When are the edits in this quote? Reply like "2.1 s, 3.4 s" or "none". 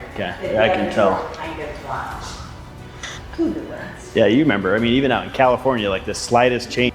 2.8 s